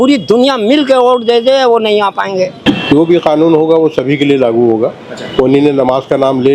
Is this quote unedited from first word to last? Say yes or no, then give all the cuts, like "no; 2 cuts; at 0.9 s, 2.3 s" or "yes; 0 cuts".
no; 1 cut; at 2.6 s